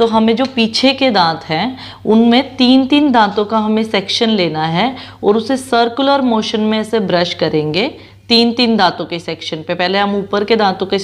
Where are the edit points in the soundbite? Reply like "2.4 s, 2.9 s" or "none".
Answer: none